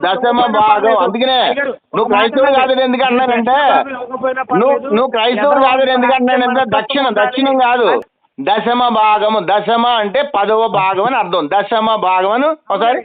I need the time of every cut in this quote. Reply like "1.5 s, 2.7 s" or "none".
8.0 s